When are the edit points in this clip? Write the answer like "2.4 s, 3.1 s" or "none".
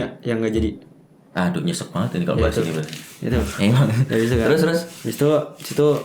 none